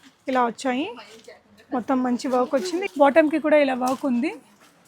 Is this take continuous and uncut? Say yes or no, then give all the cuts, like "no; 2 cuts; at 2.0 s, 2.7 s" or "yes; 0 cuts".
no; 1 cut; at 2.9 s